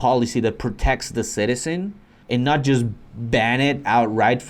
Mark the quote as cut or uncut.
uncut